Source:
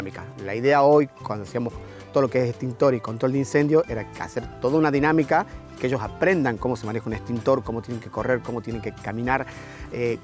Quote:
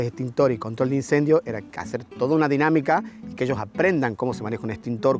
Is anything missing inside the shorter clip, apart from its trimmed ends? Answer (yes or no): no